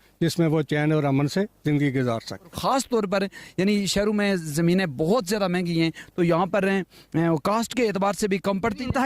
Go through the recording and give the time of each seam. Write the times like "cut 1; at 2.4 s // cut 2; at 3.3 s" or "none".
cut 1; at 2.6 s